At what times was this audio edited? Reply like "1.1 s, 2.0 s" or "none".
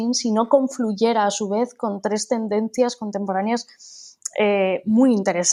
none